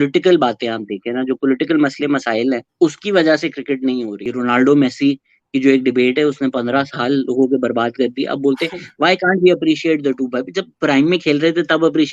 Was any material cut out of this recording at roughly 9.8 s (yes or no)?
no